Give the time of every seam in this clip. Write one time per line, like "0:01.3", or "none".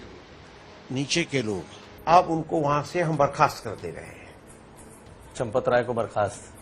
0:01.9